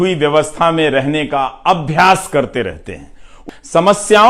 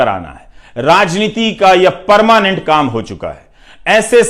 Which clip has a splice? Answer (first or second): first